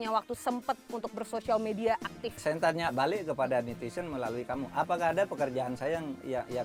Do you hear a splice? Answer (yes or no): no